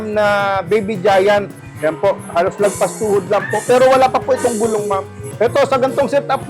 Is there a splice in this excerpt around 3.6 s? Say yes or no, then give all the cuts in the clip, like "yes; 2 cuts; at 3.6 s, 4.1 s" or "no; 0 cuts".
no; 2 cuts; at 1.6 s, 5.3 s